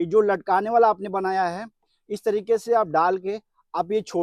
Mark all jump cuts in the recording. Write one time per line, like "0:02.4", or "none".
none